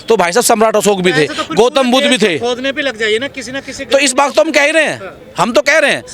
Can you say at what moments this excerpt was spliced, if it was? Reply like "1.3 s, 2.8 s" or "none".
none